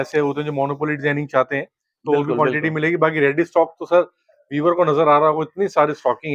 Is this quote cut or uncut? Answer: uncut